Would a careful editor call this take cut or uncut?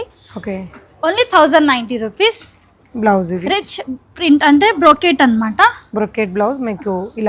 uncut